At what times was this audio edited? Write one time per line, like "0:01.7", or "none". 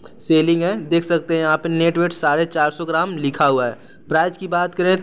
none